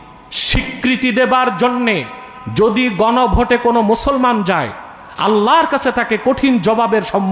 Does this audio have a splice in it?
no; 0 cuts

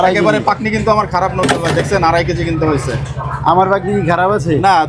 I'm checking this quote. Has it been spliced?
no; 0 cuts

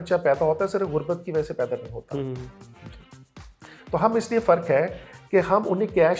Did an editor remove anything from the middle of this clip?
no; 0 cuts

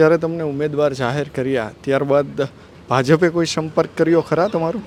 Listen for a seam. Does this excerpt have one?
no; 0 cuts

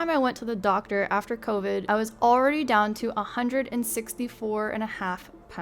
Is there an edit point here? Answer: yes; 1 cut; at 1.8 s

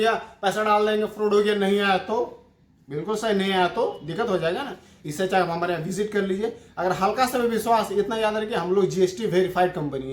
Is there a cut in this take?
no; 0 cuts

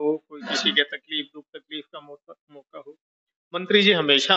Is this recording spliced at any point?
no; 0 cuts

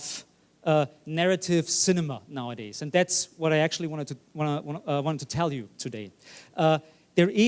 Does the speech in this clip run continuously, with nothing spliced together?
no; 1 cut; at 3.0 s

